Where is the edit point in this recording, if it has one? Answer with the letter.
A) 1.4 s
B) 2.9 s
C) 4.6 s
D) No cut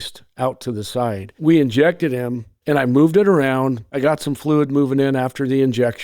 A